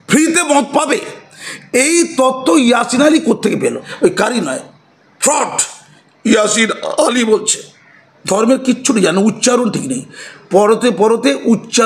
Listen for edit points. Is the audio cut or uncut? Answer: cut